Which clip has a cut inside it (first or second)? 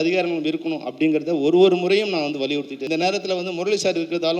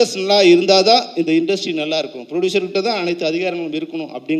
first